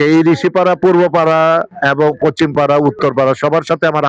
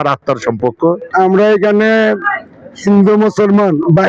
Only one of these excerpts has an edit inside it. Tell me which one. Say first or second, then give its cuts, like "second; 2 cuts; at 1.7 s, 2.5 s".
second; 1 cut; at 1.0 s